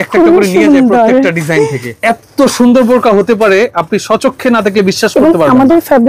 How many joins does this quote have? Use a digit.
1